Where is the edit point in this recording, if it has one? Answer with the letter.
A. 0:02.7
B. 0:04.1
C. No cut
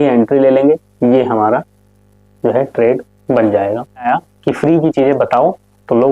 B